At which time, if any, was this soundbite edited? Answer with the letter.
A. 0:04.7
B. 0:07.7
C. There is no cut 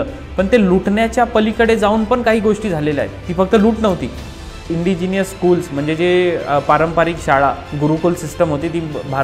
A